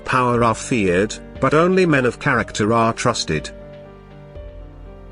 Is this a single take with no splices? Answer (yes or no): no